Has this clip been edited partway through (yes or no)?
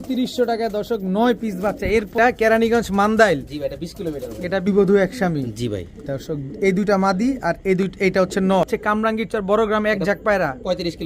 yes